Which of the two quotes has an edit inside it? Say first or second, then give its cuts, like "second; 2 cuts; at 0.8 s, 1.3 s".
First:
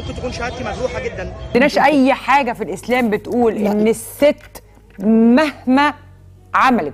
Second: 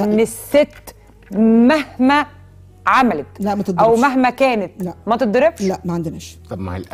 first; 1 cut; at 1.4 s